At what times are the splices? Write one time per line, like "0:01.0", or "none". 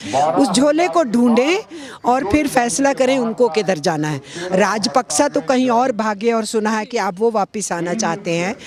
none